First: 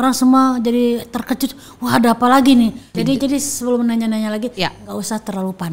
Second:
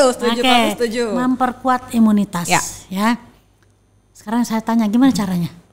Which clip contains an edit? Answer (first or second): first